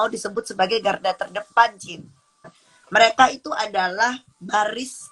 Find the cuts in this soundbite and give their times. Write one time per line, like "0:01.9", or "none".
0:02.4